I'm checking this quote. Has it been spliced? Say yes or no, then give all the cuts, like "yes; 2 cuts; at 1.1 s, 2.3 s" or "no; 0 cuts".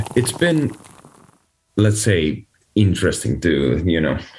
no; 0 cuts